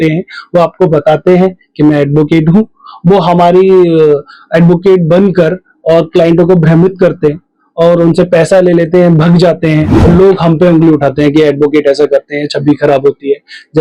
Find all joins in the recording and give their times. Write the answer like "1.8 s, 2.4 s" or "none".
10.0 s